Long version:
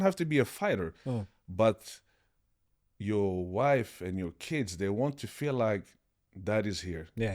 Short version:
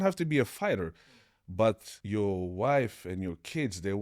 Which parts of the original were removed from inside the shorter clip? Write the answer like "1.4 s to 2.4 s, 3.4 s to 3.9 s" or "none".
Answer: 1.9 s to 2.9 s